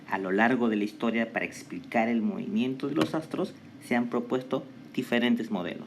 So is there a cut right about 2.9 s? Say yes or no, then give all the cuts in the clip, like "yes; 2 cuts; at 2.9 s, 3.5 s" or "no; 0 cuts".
yes; 1 cut; at 2.9 s